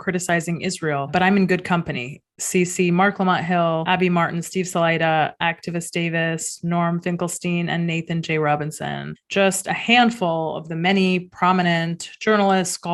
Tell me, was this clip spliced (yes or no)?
no